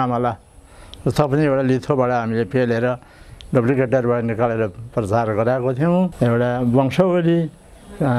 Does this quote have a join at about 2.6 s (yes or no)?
no